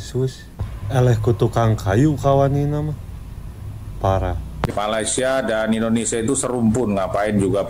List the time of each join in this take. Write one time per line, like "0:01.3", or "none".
0:04.7